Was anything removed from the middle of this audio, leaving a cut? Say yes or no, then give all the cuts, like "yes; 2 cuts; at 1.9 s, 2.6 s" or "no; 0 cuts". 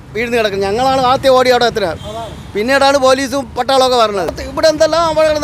no; 0 cuts